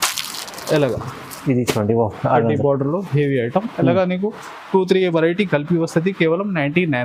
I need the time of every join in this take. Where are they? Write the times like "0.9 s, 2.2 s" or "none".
none